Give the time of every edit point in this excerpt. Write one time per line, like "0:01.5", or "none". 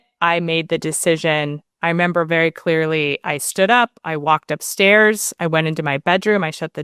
none